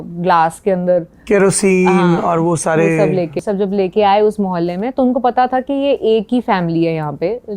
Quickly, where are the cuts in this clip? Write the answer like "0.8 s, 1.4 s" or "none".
3.4 s